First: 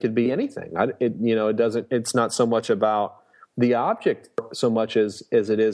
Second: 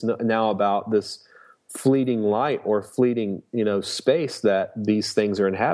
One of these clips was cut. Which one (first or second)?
first